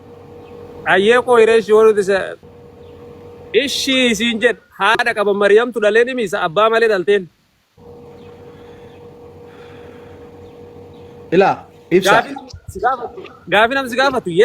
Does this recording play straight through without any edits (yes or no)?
no